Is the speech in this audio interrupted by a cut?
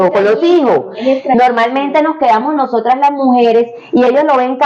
no; 0 cuts

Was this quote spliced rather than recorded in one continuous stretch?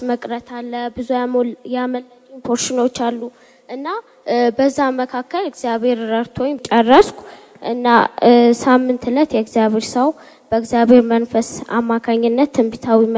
no; 0 cuts

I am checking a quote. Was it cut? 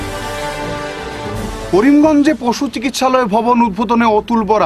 no; 0 cuts

